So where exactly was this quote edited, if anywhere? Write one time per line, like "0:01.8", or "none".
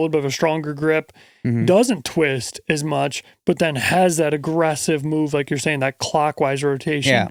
none